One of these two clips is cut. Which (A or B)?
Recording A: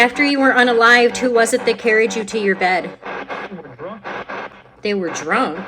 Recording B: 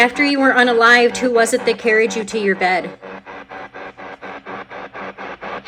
A